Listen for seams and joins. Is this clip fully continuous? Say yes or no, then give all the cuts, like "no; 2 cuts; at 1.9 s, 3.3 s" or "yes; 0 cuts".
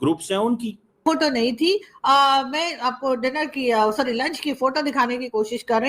no; 1 cut; at 1.0 s